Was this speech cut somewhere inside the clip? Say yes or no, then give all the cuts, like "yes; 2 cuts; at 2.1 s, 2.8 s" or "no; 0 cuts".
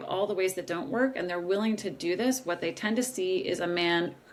no; 0 cuts